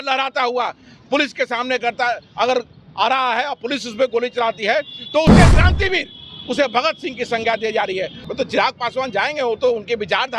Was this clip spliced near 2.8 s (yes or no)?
no